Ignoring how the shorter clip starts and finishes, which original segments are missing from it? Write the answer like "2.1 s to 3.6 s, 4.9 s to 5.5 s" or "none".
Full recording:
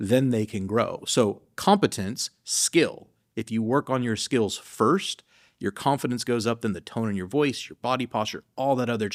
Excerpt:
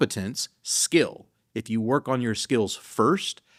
none